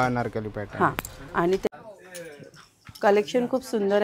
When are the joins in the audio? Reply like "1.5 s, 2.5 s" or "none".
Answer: 1.7 s